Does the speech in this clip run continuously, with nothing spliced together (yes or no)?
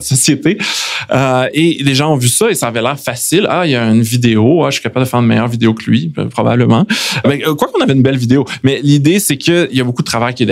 yes